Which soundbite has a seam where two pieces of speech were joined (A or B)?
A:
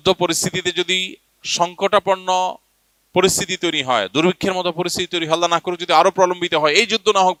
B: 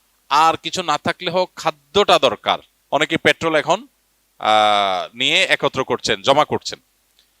B